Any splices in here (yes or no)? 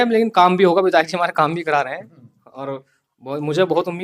no